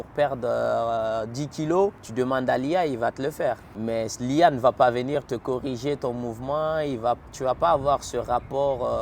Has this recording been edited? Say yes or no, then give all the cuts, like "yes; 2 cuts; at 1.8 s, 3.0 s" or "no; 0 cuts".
yes; 2 cuts; at 2.0 s, 3.7 s